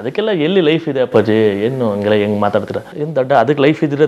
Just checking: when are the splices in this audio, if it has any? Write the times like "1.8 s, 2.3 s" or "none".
2.9 s